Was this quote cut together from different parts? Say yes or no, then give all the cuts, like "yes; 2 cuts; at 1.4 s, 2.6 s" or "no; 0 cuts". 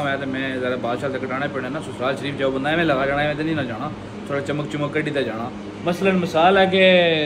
no; 0 cuts